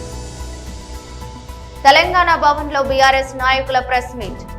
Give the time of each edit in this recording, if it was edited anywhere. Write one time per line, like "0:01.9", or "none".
none